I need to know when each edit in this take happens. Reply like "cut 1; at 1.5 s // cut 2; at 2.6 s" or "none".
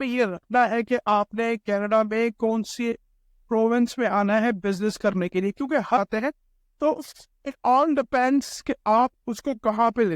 cut 1; at 6.0 s